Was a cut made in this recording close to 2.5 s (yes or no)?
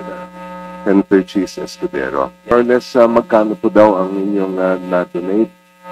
yes